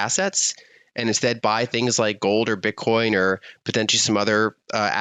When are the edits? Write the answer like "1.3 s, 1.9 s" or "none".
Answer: none